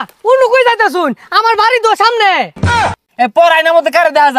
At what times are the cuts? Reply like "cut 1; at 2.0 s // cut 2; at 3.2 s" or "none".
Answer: cut 1; at 2.6 s